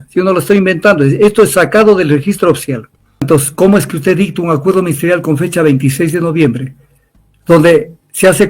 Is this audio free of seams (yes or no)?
no